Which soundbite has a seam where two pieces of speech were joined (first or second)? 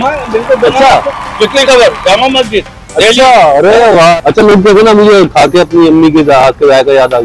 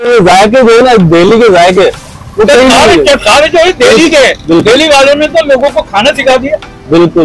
first